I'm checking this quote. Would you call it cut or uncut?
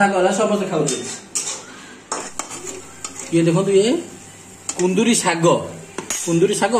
cut